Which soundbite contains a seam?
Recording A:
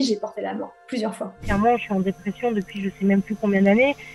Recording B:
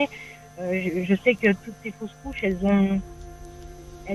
A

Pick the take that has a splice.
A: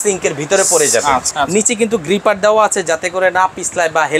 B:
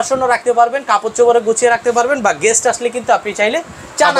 A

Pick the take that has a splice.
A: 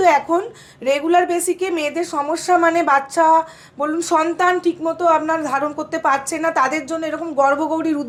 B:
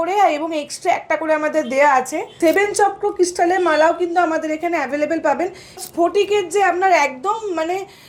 B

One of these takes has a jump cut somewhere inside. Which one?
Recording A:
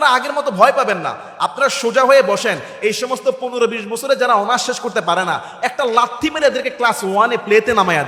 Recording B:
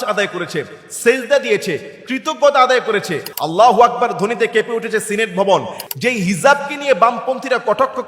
B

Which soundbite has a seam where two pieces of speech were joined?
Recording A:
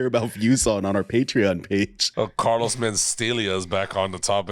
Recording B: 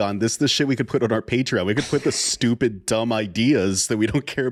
A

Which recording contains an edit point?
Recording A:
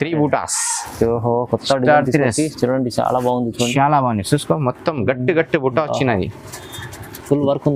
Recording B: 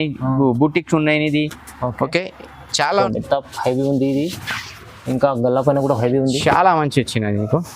B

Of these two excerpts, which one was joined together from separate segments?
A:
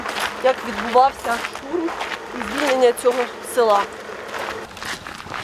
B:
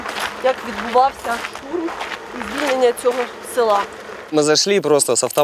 B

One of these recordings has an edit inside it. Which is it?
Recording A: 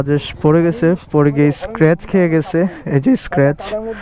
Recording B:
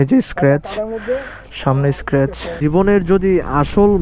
B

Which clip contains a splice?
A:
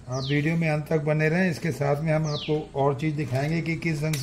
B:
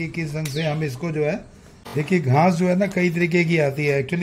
B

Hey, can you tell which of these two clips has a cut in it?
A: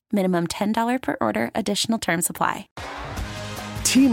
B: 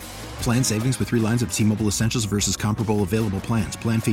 A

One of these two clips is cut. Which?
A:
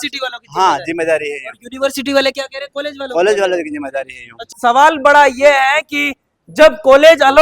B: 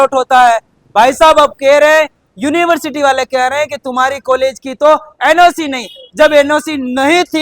A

